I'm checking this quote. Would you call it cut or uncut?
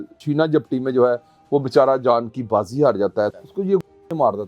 cut